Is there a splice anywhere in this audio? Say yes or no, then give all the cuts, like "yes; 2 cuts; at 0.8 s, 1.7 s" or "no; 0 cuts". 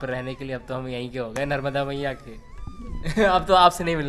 no; 0 cuts